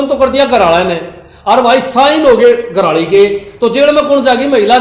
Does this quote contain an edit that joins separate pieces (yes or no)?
no